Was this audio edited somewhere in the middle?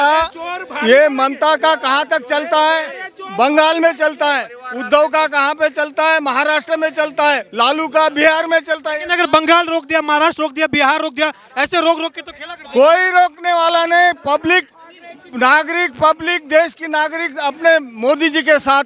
no; 0 cuts

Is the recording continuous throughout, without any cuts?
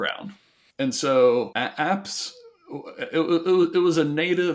yes; 0 cuts

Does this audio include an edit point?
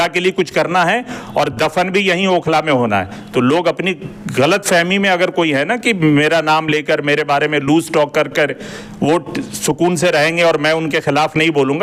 no; 0 cuts

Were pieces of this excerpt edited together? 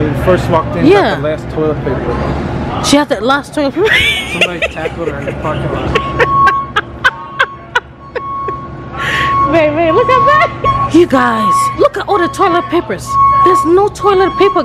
no; 0 cuts

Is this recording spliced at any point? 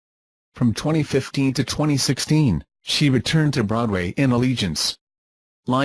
yes; 1 cut; at 1.8 s

